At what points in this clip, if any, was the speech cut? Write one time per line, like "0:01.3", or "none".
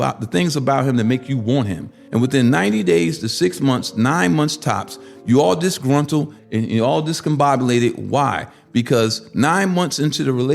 0:02.0
0:06.4